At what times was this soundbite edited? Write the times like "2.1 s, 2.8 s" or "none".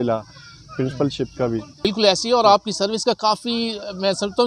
1.8 s